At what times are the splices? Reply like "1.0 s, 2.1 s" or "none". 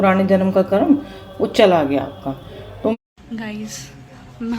2.9 s